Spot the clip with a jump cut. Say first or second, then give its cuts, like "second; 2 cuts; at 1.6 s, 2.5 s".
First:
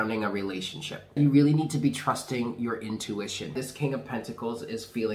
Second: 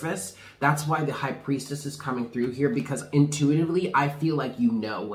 first; 2 cuts; at 1.1 s, 3.5 s